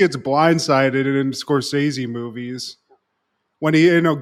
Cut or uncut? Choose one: uncut